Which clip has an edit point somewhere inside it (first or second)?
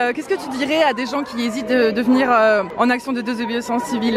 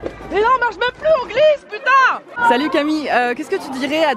second